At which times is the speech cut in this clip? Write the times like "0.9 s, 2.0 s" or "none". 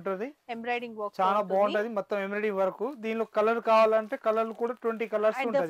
none